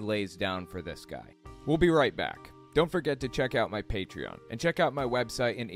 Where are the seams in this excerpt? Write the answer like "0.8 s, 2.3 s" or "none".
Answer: none

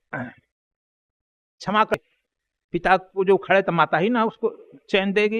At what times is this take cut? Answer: 1.9 s

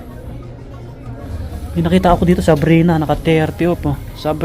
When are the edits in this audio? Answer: 1.3 s

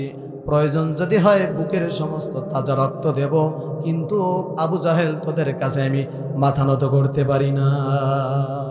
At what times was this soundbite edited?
none

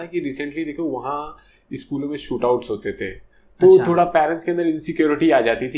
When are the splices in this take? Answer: none

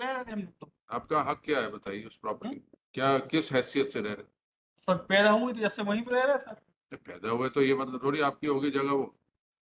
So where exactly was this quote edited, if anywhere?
none

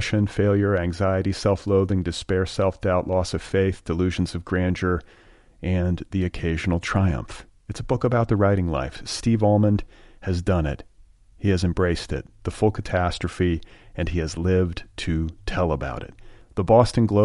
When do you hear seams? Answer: none

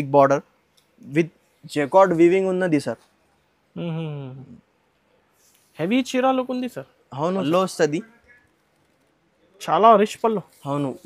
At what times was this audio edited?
7.4 s

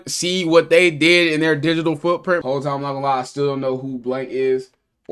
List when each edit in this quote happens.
2.4 s

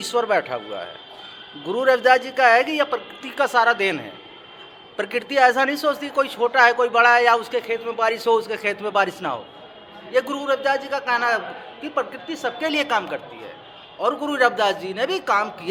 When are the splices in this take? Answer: none

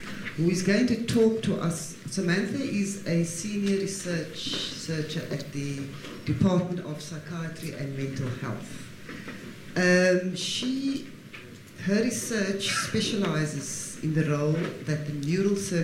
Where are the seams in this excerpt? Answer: 8.9 s

